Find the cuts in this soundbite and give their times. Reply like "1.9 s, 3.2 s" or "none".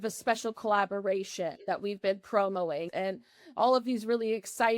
2.9 s